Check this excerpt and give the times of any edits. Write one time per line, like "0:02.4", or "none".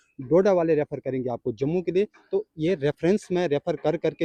none